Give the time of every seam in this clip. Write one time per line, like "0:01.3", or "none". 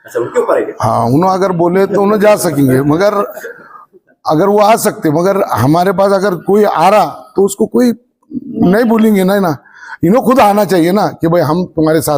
none